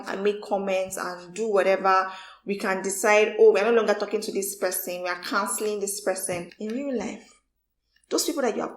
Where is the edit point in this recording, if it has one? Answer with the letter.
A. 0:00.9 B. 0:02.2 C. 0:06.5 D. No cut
C